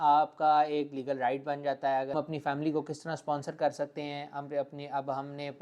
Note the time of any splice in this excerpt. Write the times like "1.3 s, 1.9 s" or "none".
2.1 s

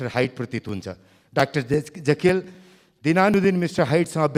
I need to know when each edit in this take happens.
none

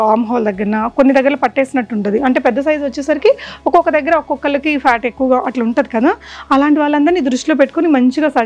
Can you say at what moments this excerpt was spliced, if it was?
none

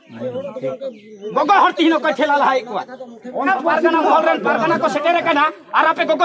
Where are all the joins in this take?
3.5 s

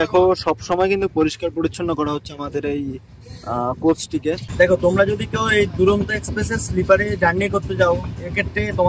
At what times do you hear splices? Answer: 4.5 s

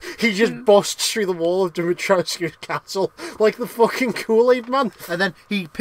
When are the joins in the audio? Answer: none

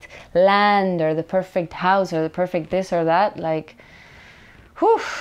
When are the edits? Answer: none

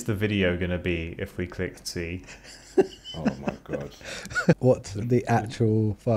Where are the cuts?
4.6 s

